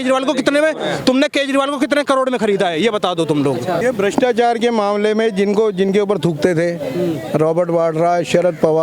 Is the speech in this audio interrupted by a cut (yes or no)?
yes